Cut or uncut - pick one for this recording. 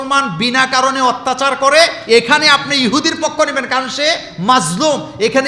uncut